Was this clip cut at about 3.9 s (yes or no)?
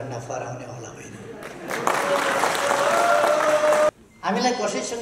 yes